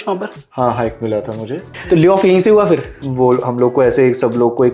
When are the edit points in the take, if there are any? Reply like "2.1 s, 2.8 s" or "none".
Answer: 1.7 s, 3.0 s